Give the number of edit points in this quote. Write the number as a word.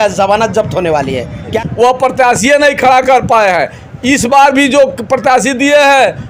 one